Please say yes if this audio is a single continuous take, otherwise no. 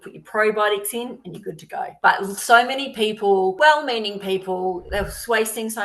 no